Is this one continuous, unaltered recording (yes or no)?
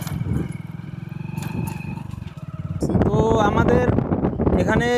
no